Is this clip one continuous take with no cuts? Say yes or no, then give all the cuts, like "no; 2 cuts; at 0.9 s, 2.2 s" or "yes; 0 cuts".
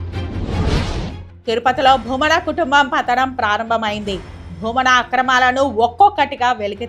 no; 1 cut; at 1.2 s